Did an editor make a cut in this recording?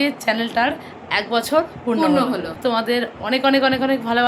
yes; 1 cut; at 2.6 s

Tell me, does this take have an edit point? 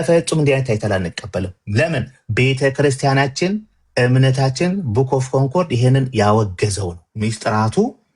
yes; 1 cut; at 7.0 s

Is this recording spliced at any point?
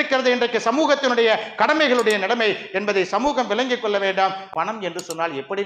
yes; 1 cut; at 4.4 s

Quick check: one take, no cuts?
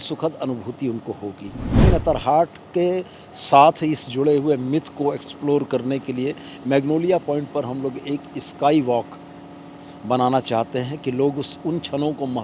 no; 1 cut; at 1.8 s

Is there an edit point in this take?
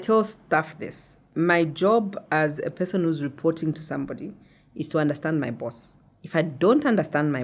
no; 0 cuts

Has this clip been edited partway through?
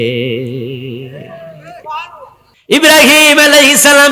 yes; 1 cut; at 2.7 s

